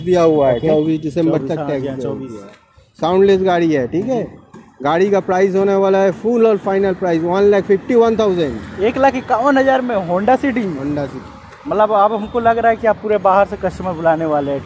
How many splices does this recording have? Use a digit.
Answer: 0